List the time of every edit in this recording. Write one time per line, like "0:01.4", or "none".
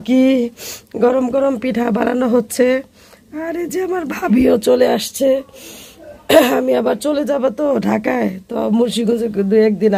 none